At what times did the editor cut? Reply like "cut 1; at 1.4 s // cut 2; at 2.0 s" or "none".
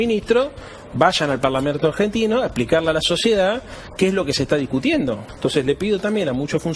cut 1; at 5.3 s